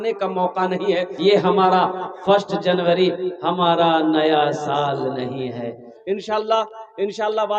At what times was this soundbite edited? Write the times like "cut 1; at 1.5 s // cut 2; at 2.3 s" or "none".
cut 1; at 1.1 s // cut 2; at 6.1 s